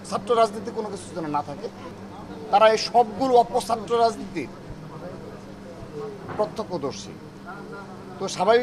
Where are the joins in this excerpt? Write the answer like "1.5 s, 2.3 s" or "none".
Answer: 1.9 s

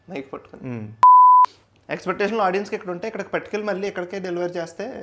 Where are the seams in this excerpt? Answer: 0.8 s, 1.4 s

